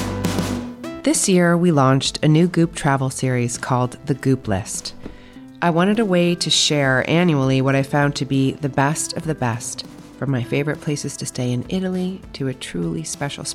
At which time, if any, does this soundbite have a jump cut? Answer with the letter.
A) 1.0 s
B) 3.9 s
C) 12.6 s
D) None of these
A